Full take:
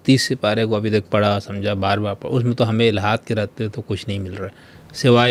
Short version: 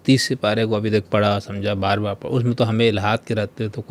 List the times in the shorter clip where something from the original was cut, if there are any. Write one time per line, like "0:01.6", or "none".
none

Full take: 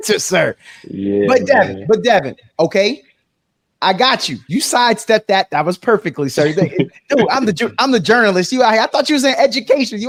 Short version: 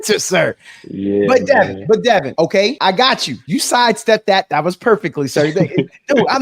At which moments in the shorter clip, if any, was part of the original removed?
0:02.4

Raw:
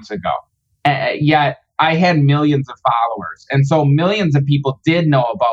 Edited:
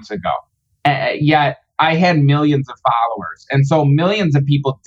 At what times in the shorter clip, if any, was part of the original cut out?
none

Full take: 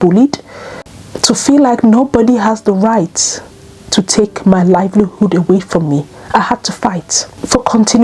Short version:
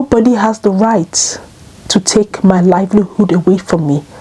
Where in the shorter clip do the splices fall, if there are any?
none

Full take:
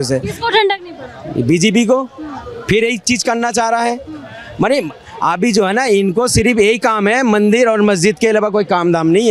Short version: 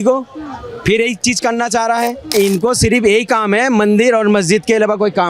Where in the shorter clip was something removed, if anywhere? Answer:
0:02.3

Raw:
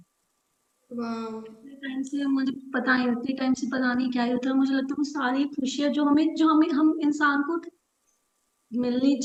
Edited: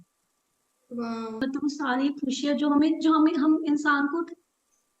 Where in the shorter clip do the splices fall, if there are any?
0:01.4

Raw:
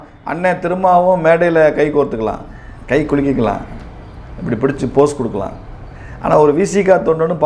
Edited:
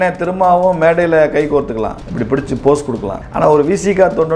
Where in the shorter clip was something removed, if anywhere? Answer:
0:02.1
0:03.2

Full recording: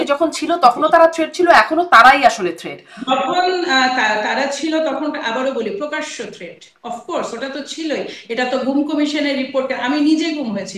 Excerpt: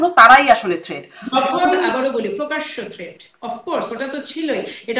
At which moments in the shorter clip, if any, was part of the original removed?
0:01.9

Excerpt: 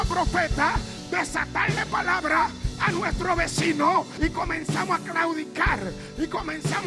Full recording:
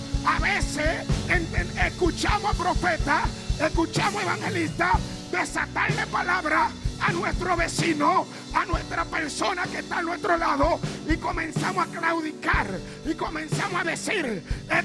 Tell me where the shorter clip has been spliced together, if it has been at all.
0:00.9
0:04.1

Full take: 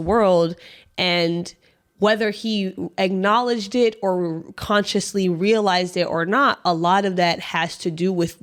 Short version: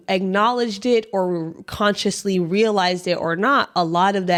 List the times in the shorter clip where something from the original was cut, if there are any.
none

